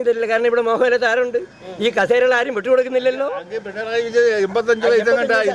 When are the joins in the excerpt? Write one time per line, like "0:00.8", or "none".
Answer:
none